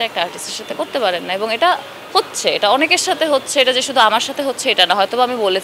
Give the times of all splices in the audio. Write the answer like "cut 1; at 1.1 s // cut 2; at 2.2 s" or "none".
none